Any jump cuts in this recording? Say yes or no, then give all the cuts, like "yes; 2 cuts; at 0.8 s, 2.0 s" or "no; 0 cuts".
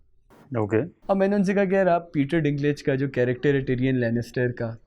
yes; 1 cut; at 0.9 s